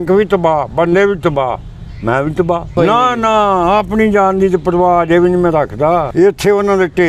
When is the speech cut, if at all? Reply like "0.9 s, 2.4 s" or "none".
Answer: 2.7 s, 6.1 s